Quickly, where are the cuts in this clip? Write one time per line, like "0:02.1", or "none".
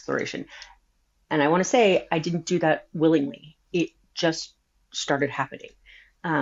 none